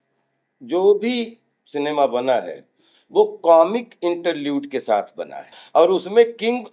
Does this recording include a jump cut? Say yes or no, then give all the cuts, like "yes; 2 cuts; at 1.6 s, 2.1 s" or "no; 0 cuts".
yes; 1 cut; at 5.6 s